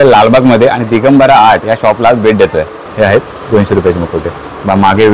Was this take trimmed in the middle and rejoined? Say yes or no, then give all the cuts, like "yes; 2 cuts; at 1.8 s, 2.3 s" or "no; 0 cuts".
yes; 1 cut; at 2.8 s